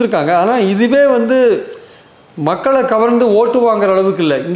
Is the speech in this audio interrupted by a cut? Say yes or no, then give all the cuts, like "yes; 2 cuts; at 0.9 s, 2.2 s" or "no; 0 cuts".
no; 0 cuts